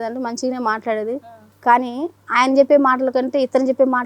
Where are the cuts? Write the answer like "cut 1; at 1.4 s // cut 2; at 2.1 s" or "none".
cut 1; at 1.3 s